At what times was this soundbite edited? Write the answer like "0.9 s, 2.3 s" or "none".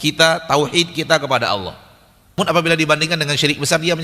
2.4 s